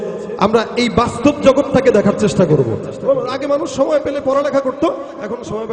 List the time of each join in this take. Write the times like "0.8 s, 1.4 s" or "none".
2.9 s